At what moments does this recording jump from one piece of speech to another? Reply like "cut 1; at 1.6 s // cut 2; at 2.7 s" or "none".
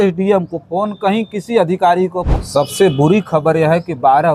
cut 1; at 2.3 s

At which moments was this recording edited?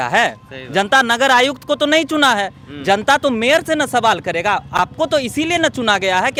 none

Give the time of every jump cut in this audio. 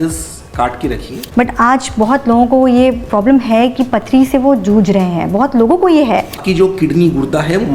cut 1; at 1.1 s // cut 2; at 6.4 s

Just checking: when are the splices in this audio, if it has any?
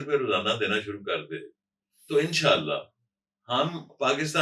none

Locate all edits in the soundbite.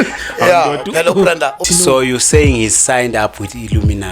cut 1; at 1.6 s

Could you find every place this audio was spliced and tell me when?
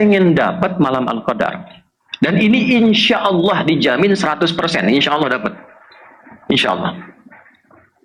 none

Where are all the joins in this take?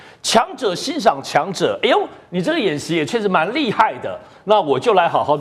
none

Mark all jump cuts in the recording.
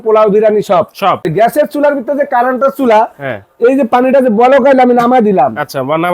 cut 1; at 1.3 s

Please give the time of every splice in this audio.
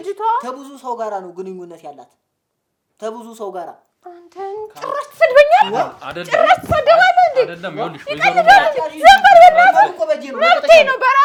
none

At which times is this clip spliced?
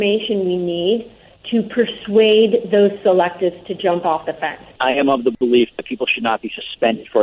cut 1; at 4.8 s

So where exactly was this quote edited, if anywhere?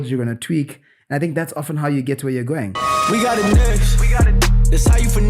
cut 1; at 2.8 s

